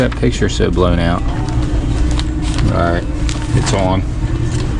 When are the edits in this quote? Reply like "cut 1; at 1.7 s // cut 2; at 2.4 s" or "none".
cut 1; at 2.0 s